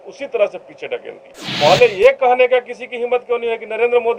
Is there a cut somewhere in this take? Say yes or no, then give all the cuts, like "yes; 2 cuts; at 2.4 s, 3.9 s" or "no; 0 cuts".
yes; 1 cut; at 1.2 s